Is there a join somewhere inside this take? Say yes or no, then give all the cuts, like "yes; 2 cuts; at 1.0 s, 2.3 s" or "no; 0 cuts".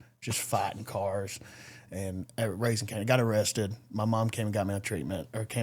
no; 0 cuts